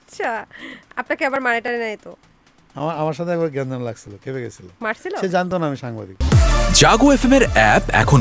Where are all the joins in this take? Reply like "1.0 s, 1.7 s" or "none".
6.1 s